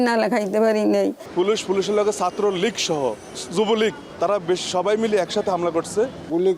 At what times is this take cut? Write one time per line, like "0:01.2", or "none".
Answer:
0:01.2
0:03.3
0:04.0